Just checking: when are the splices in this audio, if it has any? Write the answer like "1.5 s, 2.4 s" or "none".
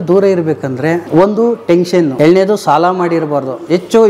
1.0 s, 2.1 s